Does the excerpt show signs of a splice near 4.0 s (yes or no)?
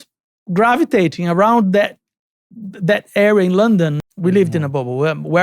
yes